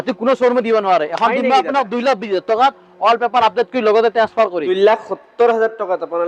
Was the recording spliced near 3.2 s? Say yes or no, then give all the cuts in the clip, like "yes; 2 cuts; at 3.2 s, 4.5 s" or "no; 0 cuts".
no; 1 cut; at 4.6 s